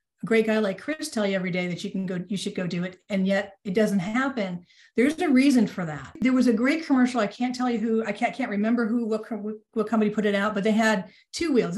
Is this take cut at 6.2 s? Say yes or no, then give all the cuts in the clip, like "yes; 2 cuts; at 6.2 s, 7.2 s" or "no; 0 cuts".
yes; 1 cut; at 6.2 s